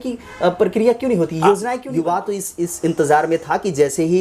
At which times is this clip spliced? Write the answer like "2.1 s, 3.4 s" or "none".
1.8 s

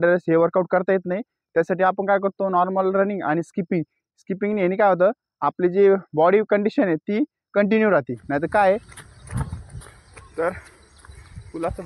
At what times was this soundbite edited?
8.9 s

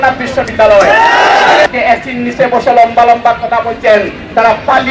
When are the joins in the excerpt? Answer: 1.7 s

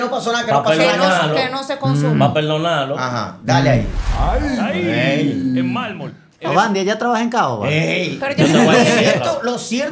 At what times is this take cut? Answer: 4.0 s

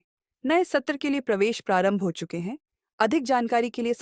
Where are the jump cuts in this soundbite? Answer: none

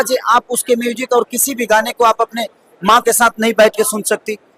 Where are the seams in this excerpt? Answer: none

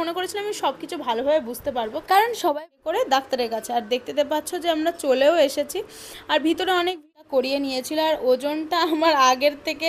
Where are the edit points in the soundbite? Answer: 2.6 s, 7.0 s

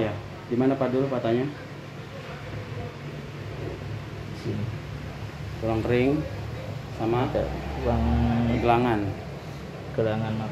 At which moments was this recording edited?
none

